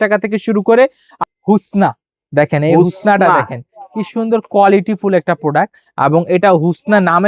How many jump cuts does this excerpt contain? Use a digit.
1